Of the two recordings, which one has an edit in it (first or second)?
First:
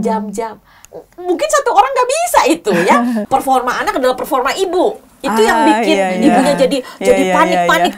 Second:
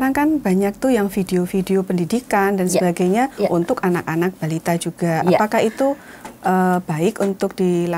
first